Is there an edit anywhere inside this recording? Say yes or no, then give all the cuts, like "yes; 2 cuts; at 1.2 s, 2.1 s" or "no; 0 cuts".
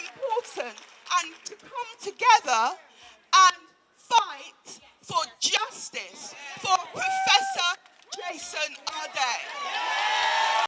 no; 0 cuts